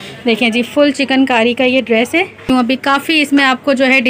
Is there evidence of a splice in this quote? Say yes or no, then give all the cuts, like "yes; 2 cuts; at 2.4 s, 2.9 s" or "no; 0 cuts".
yes; 1 cut; at 2.5 s